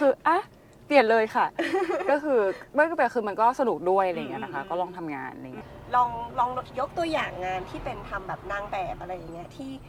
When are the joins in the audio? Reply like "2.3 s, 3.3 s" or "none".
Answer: none